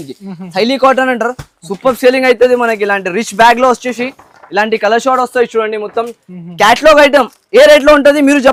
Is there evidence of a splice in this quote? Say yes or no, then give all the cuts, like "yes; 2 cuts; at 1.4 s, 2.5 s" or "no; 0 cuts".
no; 0 cuts